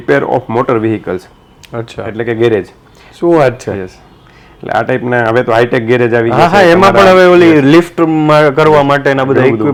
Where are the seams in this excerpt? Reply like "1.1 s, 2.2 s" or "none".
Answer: none